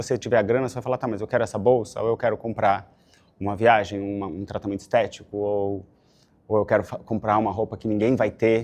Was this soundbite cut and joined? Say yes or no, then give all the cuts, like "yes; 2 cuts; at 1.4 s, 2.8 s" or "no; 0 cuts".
no; 0 cuts